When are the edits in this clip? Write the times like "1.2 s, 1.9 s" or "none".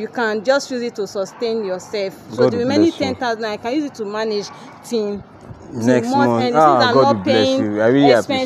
none